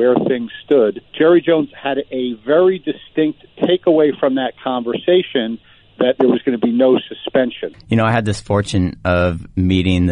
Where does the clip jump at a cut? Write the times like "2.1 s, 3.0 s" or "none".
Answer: 1.0 s, 7.7 s